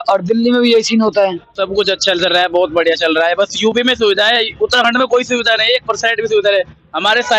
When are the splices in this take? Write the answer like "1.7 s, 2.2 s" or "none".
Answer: 1.5 s